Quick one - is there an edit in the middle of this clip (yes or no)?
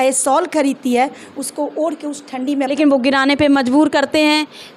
yes